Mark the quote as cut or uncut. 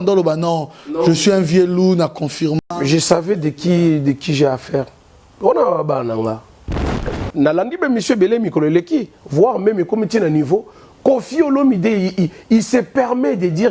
cut